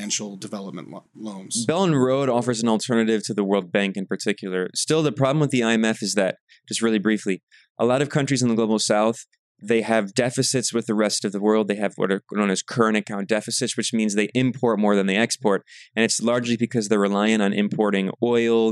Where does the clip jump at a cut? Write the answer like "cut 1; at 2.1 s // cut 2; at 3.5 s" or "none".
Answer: cut 1; at 1.1 s